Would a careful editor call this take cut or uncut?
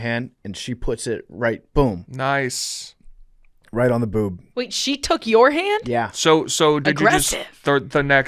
uncut